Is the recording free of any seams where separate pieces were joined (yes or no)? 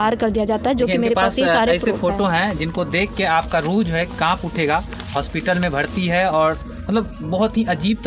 yes